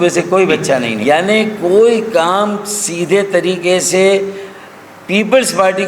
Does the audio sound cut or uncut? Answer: cut